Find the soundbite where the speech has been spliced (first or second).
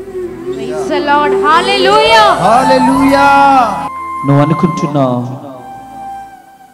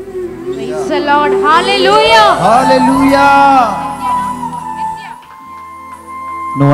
first